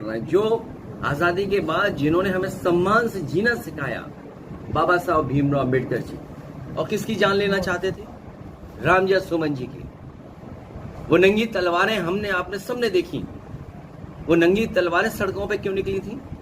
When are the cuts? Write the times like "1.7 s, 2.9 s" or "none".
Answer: 6.6 s